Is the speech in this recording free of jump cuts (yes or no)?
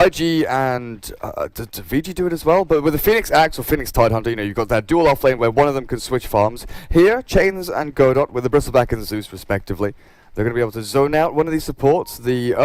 yes